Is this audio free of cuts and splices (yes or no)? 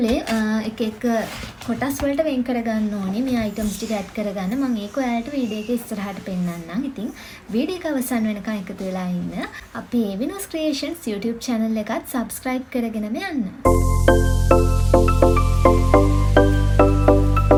yes